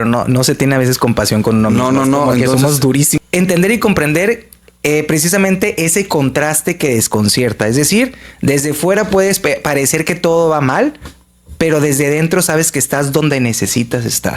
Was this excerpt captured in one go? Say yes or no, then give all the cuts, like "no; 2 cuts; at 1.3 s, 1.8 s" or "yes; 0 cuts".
no; 1 cut; at 3.1 s